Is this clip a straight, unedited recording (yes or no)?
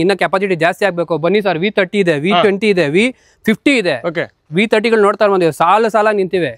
yes